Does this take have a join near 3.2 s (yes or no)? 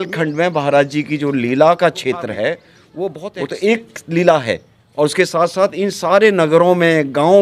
yes